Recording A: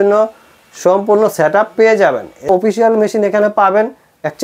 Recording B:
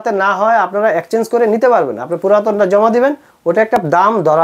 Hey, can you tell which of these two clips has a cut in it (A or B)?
A